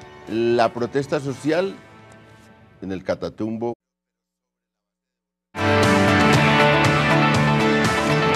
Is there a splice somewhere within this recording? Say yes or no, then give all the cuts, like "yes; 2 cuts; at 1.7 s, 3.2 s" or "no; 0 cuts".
no; 0 cuts